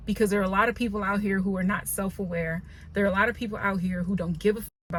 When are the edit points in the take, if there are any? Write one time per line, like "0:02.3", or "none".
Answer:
none